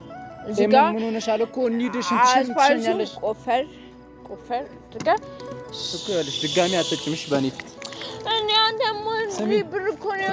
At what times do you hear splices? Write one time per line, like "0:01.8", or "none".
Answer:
none